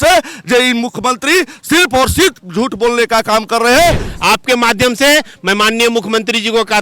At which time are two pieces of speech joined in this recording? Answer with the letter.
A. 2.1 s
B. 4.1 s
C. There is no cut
B